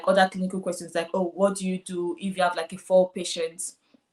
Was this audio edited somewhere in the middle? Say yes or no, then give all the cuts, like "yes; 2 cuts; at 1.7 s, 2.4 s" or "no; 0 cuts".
no; 0 cuts